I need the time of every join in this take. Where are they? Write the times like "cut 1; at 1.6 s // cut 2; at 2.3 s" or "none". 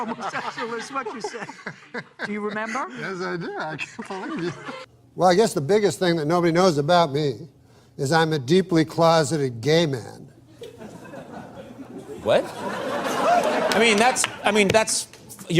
cut 1; at 4.8 s // cut 2; at 13.6 s